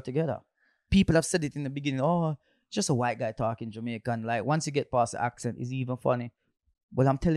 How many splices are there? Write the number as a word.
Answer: zero